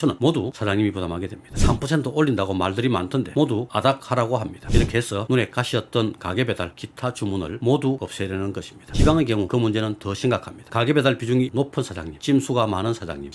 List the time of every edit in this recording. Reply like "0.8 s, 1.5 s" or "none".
1.4 s, 4.6 s, 8.8 s, 10.6 s